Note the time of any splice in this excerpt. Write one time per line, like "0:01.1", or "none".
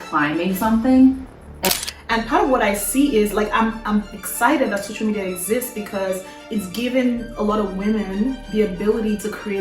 0:01.7